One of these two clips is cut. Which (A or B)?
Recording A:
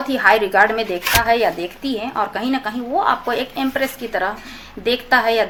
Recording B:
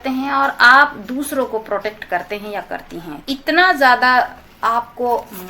B